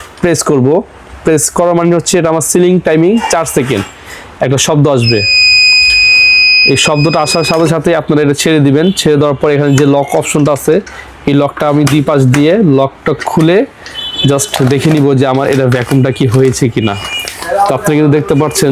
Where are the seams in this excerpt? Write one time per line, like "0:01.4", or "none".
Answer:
none